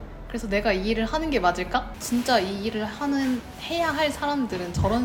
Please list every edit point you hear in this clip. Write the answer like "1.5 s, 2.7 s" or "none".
2.0 s